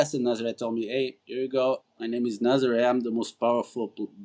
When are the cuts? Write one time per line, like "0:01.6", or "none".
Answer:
0:01.2
0:01.9